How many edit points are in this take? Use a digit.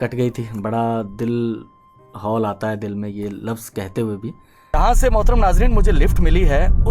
1